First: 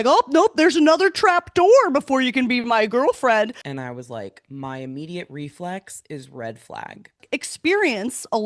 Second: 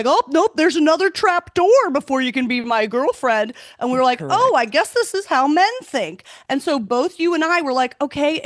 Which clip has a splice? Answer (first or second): first